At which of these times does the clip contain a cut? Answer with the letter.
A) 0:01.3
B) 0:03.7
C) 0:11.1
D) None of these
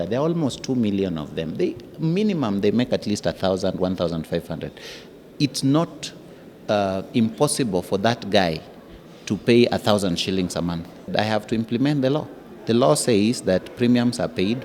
C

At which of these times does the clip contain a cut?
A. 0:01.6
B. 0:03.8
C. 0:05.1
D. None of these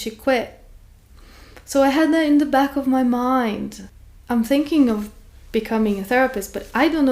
B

